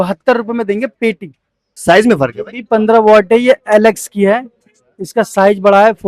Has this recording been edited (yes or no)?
yes